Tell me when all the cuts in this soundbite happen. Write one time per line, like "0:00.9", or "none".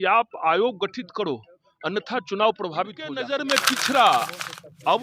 0:03.2